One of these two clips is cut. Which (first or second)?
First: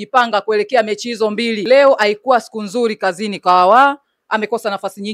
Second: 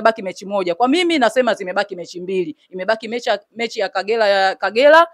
first